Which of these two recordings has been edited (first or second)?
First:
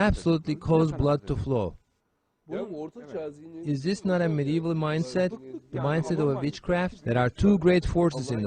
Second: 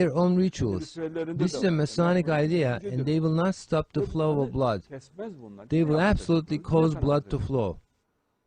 first